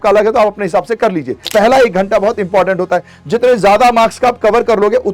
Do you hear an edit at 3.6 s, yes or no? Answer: no